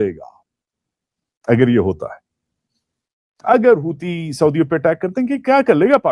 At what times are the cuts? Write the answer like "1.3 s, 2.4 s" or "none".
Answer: none